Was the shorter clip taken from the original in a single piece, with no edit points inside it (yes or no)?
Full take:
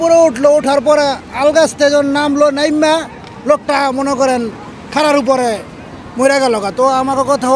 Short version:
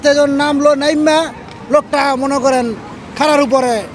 yes